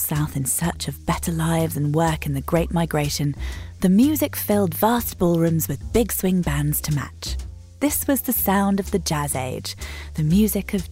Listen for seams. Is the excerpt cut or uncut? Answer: cut